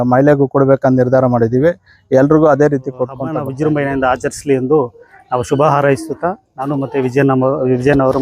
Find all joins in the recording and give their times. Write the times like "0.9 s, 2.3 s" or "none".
3.5 s